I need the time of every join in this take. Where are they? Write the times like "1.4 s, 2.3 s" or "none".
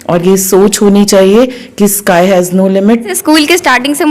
3.1 s

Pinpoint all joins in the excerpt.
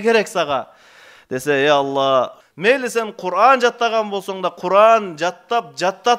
2.4 s

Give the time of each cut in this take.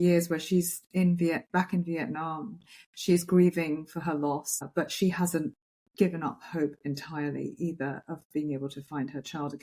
4.7 s

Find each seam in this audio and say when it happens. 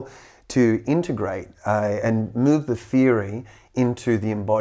none

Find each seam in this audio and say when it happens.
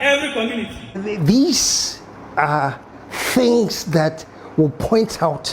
1.0 s

